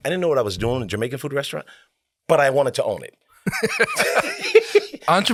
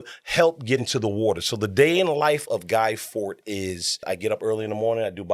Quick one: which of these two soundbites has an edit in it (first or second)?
second